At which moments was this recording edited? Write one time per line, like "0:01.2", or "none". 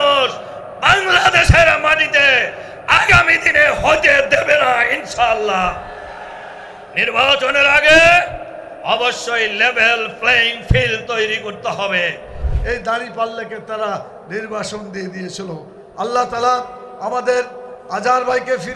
0:12.5

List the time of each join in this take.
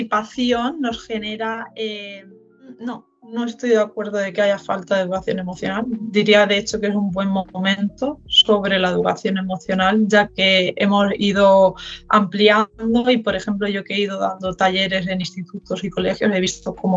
0:02.9

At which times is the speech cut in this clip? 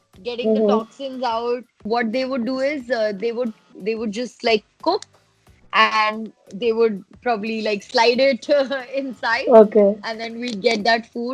0:01.8

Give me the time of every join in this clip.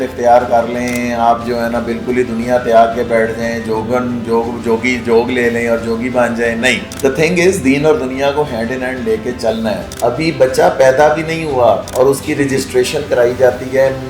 0:09.9
0:11.9

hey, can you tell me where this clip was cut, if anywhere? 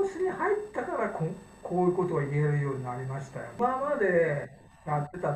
0:03.6

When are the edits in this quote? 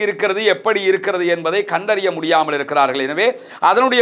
none

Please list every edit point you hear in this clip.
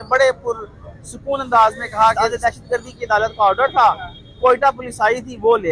0:02.1

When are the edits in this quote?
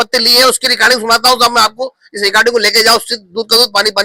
none

